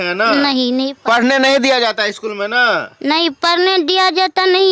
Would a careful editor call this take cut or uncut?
uncut